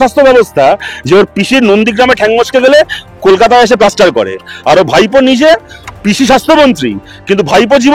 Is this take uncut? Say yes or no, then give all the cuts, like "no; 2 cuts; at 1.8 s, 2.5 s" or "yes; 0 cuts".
yes; 0 cuts